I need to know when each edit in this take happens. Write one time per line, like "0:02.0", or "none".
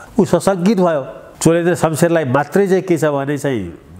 0:01.2